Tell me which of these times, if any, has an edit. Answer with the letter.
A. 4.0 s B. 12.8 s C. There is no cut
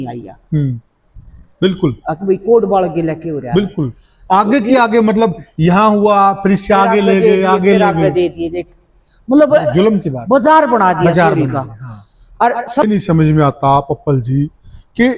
B